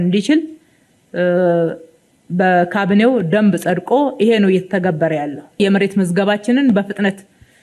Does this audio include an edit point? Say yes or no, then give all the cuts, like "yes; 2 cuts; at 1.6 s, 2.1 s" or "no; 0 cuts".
yes; 1 cut; at 5.4 s